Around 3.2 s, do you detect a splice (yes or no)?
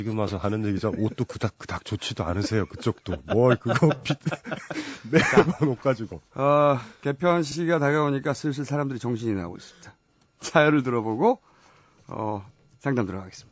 no